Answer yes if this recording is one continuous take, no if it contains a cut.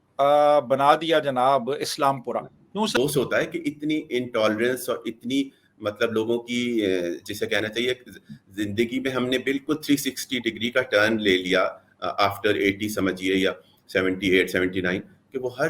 no